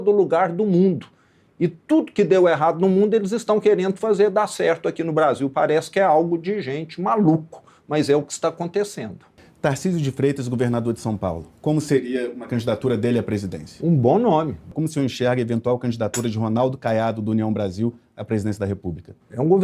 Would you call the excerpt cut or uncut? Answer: cut